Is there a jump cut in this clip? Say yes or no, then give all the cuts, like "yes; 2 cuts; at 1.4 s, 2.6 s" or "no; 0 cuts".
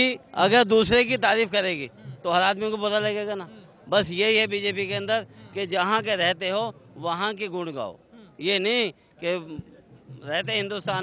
no; 0 cuts